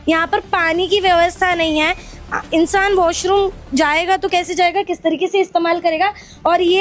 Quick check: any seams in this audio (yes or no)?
no